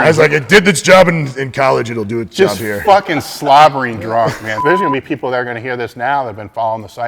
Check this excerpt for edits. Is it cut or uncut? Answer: cut